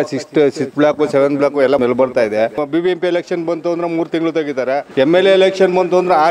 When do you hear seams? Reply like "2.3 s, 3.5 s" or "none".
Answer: 1.8 s, 2.5 s, 4.9 s